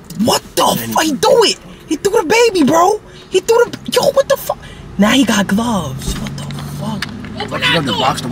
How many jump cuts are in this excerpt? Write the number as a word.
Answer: zero